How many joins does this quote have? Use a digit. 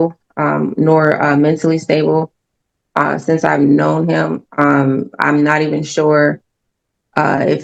0